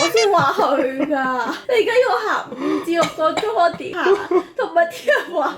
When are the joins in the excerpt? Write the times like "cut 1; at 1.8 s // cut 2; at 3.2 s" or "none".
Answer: none